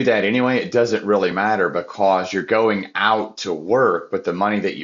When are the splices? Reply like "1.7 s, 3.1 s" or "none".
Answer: none